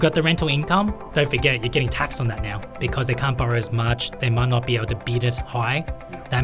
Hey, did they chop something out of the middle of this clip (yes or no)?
yes